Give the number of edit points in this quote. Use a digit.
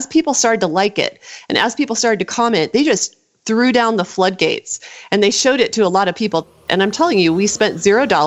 1